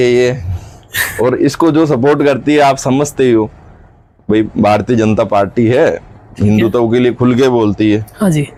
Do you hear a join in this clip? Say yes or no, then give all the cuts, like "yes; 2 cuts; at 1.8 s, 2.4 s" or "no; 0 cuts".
no; 0 cuts